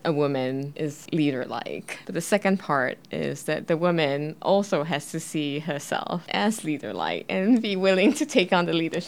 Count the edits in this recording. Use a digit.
0